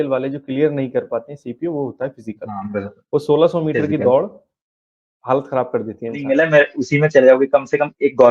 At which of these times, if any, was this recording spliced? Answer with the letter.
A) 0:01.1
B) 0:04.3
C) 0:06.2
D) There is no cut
C